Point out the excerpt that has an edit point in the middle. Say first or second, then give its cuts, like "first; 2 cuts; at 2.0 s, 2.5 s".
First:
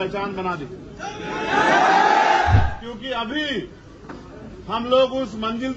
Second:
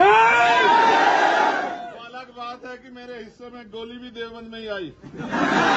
first; 1 cut; at 2.6 s